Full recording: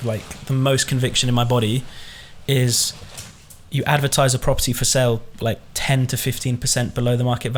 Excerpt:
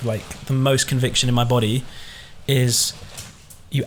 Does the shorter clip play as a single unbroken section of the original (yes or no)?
yes